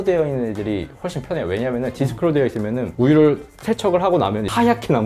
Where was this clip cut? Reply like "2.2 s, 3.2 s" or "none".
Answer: none